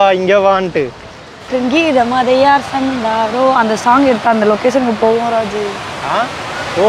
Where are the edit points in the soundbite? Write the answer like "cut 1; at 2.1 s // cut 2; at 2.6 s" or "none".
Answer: cut 1; at 1.5 s

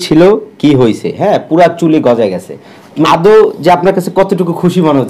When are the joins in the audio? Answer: none

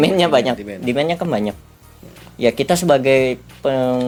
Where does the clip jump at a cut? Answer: none

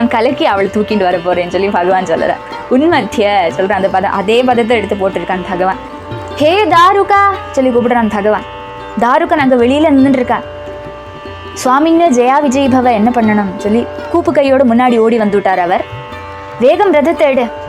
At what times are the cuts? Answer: cut 1; at 5.9 s

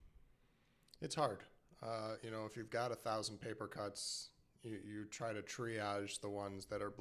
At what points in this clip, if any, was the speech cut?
none

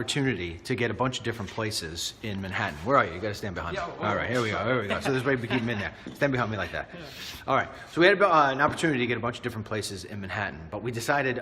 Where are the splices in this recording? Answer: cut 1; at 3.4 s

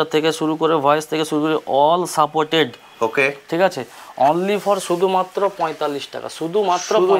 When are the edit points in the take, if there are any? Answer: none

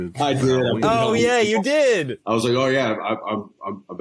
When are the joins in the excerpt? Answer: cut 1; at 2.2 s

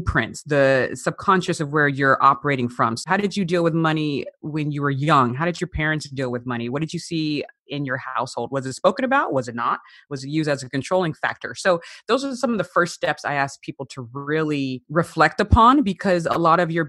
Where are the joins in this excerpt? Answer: cut 1; at 3.0 s // cut 2; at 14.8 s

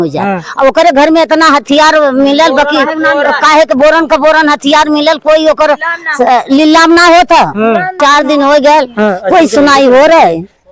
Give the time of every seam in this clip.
cut 1; at 8.0 s

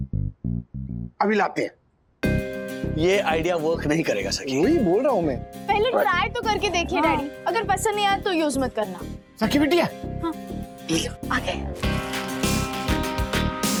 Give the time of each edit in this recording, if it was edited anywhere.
none

